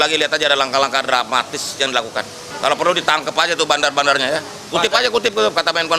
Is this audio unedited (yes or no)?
no